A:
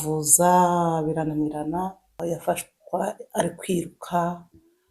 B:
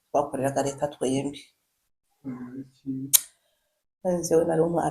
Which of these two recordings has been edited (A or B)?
A